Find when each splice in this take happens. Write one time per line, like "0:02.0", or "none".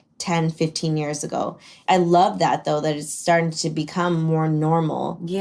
0:01.7